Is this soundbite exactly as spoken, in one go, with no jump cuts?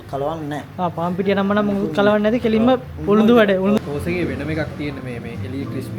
no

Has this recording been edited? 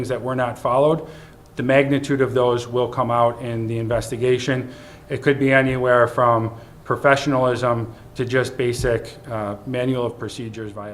no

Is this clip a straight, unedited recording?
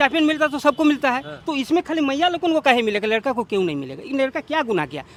yes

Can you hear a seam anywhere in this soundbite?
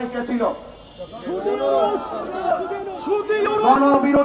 no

